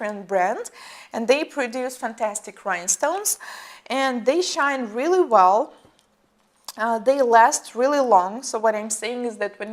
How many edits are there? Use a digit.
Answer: 1